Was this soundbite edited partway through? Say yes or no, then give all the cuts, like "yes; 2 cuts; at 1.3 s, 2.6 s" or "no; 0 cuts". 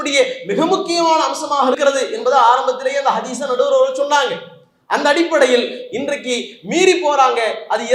no; 0 cuts